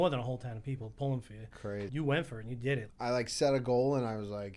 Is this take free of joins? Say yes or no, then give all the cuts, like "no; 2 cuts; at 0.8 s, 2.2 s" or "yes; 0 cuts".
no; 2 cuts; at 1.9 s, 2.9 s